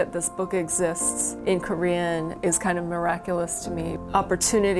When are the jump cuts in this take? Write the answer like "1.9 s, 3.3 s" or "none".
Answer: 1.1 s, 2.4 s, 3.9 s